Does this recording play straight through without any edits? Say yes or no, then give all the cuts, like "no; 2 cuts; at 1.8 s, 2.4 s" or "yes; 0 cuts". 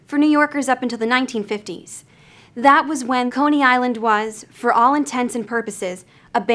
no; 1 cut; at 3.3 s